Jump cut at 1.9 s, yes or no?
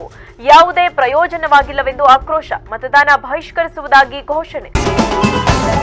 no